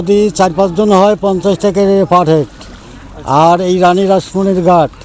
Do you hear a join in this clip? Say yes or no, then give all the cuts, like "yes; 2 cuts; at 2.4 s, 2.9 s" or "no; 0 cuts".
no; 0 cuts